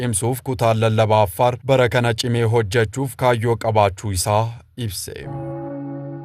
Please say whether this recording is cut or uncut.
cut